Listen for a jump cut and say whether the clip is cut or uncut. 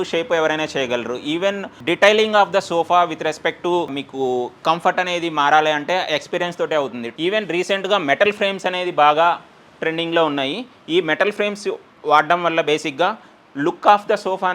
cut